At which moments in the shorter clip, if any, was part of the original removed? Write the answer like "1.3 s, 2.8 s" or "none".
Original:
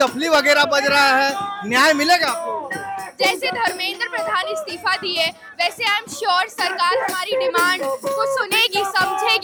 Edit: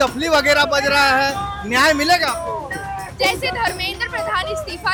none